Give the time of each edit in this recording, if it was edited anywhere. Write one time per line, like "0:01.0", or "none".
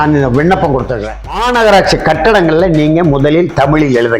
0:01.4